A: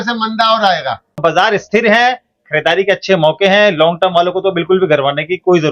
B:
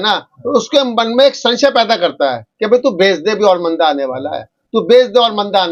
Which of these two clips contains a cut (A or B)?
A